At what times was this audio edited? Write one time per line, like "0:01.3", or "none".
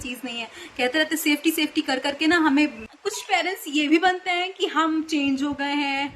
0:02.8